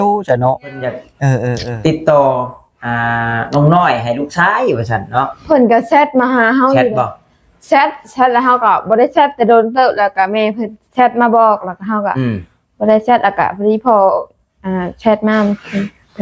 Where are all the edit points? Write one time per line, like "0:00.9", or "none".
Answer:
0:01.6